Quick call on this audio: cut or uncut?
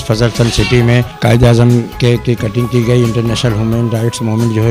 uncut